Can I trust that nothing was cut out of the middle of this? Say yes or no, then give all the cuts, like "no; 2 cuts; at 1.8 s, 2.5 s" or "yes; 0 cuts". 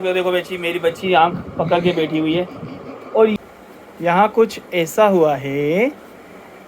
no; 1 cut; at 3.4 s